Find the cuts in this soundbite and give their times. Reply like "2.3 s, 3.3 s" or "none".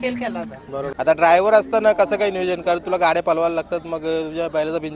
0.9 s